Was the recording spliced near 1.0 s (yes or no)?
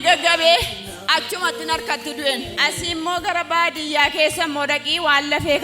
no